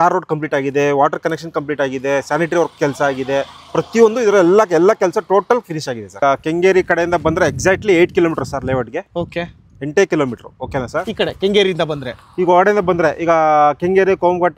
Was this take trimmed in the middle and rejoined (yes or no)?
yes